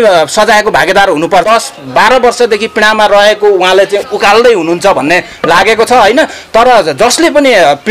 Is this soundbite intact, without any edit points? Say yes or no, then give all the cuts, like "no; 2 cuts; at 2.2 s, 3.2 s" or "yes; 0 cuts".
no; 1 cut; at 1.5 s